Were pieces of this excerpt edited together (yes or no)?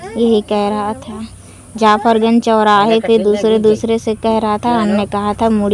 no